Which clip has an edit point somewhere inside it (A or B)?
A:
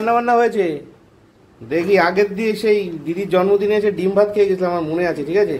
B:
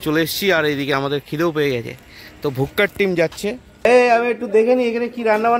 B